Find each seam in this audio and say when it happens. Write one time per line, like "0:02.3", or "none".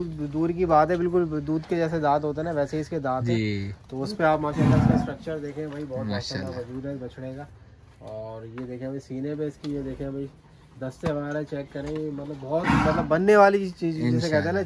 none